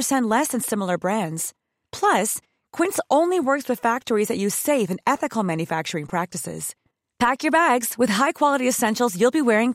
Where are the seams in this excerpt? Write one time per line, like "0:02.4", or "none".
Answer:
none

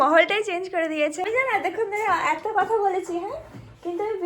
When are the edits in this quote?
0:01.2

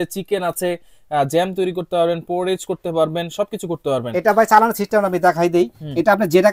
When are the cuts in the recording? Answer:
none

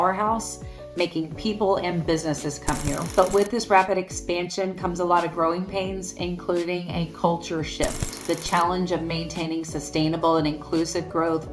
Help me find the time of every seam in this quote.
0:03.0

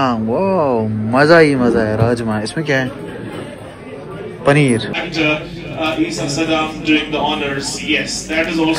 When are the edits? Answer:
0:04.9

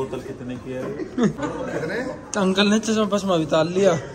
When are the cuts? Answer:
0:01.4

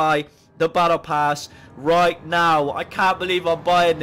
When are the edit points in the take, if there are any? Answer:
none

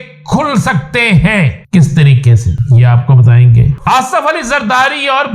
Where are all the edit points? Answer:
0:01.6
0:02.5
0:03.8

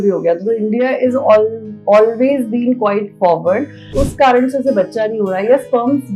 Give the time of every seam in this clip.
0:03.9

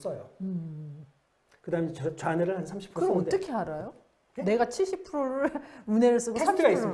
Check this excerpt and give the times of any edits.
none

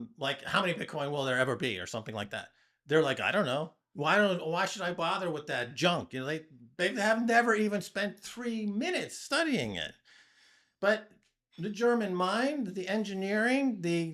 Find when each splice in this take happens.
none

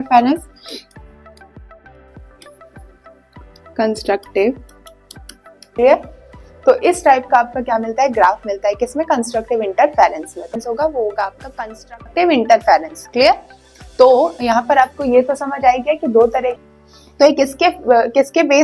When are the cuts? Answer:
0:05.6
0:10.6
0:16.6

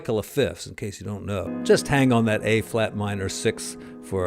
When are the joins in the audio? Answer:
0:01.5

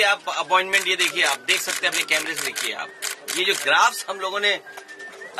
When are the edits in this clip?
none

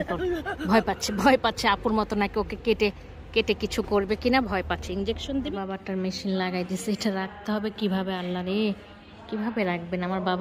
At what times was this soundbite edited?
0:05.5

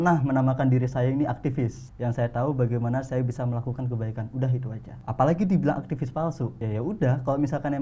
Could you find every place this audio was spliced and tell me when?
0:01.8
0:04.9
0:06.6

